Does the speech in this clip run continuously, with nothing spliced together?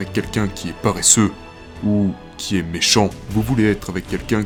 yes; 0 cuts

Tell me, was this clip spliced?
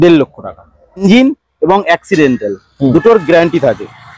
yes; 1 cut; at 1.0 s

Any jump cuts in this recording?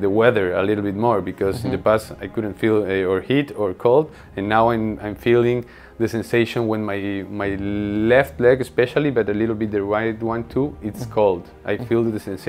no; 0 cuts

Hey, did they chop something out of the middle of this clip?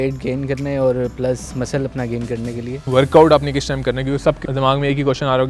yes; 2 cuts; at 2.9 s, 4.4 s

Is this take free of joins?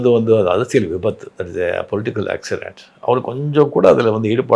yes; 0 cuts

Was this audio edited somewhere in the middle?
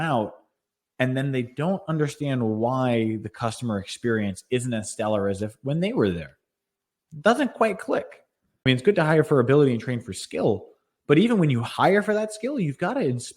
yes; 1 cut; at 8.6 s

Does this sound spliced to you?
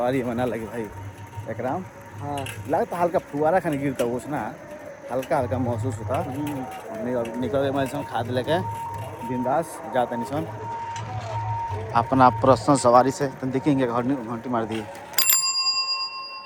no; 0 cuts

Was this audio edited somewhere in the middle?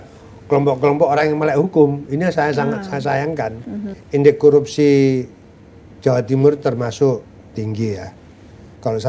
yes; 1 cut; at 3.9 s

